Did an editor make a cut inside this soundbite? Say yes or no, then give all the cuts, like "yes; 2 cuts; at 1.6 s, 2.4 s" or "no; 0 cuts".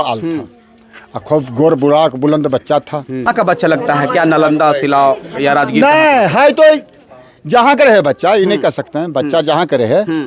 yes; 1 cut; at 3.2 s